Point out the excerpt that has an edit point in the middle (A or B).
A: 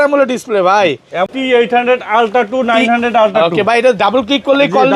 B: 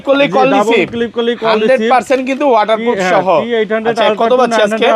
A